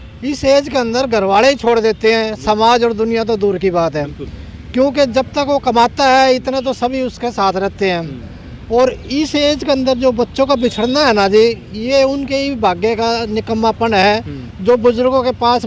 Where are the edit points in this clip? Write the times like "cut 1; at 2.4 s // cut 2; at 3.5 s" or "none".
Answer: none